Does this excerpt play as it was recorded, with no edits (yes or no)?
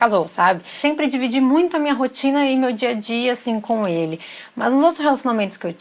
no